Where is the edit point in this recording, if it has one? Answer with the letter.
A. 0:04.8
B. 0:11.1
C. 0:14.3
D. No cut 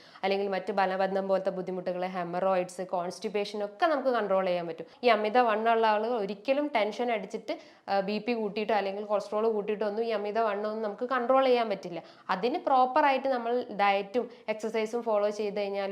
A